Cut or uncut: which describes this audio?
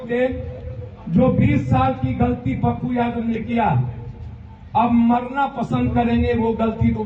uncut